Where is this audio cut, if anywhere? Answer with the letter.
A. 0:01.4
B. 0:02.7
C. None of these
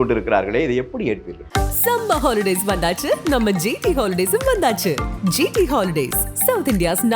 A